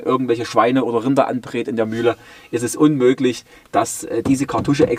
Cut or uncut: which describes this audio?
uncut